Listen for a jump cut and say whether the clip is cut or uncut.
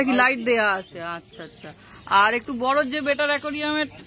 uncut